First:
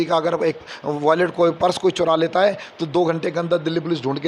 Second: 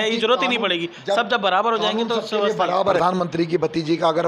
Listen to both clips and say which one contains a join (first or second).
second